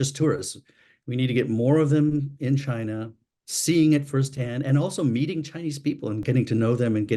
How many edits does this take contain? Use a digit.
1